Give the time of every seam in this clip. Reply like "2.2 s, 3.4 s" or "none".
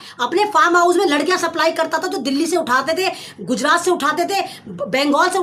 none